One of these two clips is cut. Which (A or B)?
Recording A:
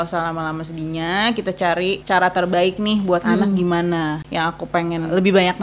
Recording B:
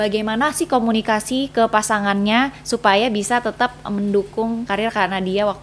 A